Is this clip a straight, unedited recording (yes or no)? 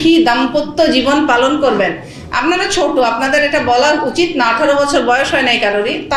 yes